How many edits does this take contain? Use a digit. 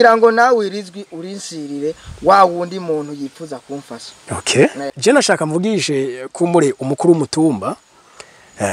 1